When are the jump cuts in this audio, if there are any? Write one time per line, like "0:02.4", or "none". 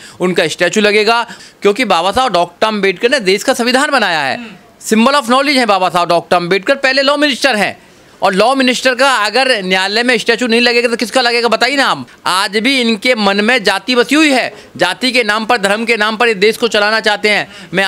0:01.4
0:12.1